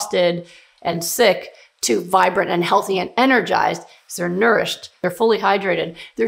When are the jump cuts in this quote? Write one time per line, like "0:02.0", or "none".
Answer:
0:05.0